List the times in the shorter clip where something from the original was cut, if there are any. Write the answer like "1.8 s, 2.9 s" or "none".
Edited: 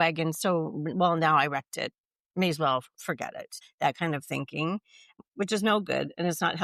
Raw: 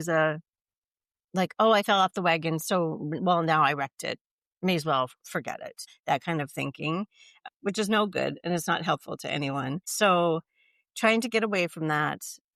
none